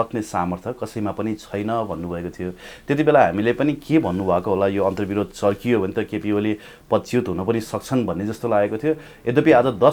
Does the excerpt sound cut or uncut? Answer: uncut